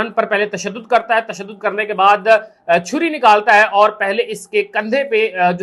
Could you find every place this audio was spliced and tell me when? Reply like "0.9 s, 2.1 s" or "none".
none